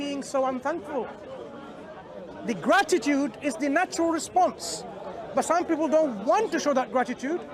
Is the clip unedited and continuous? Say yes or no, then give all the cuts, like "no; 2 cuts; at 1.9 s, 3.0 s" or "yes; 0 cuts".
yes; 0 cuts